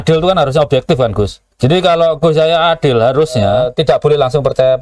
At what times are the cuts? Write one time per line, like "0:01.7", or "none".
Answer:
0:01.4
0:03.5